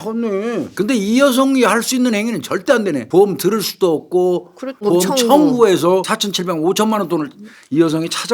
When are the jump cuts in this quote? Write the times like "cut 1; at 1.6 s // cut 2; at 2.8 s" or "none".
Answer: cut 1; at 3.0 s // cut 2; at 4.8 s // cut 3; at 6.1 s